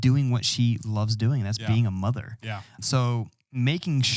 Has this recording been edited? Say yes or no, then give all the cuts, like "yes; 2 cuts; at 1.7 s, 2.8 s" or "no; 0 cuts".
yes; 1 cut; at 2.8 s